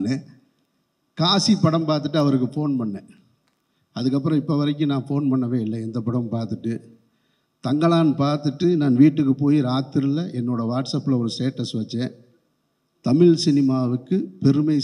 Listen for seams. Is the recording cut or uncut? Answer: uncut